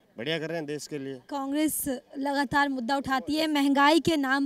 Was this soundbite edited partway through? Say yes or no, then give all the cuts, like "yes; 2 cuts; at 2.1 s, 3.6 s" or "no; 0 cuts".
no; 0 cuts